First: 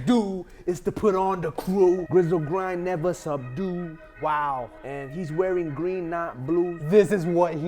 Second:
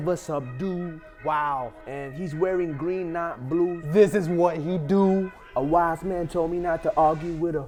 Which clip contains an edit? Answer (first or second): first